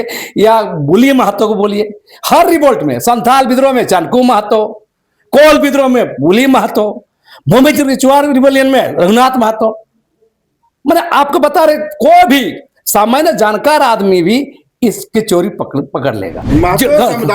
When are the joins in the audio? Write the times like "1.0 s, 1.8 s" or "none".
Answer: 16.3 s